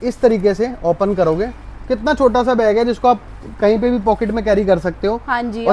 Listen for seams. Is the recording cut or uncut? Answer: uncut